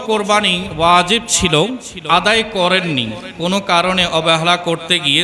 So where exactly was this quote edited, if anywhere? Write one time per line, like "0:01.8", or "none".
0:01.9

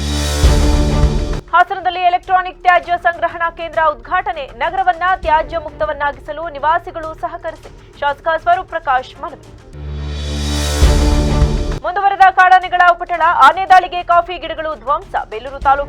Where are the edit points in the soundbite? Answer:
none

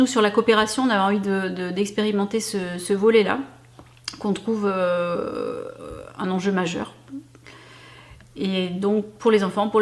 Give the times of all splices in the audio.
none

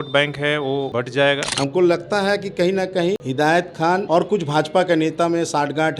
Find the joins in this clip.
0:01.2
0:03.2
0:04.0

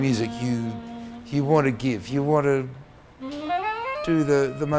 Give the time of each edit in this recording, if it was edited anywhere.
none

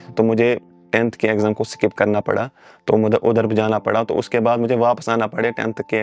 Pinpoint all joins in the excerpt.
none

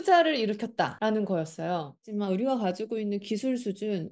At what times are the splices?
0:00.9
0:02.0

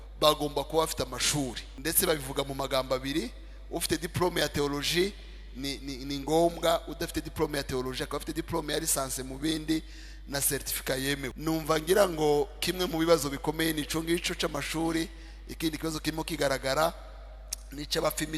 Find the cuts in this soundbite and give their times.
0:01.7
0:11.3

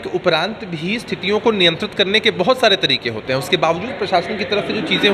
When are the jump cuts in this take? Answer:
none

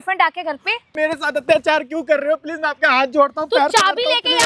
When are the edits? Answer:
0:00.9

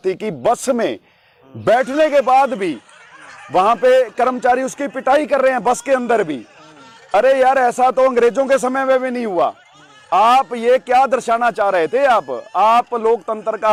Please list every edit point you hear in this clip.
none

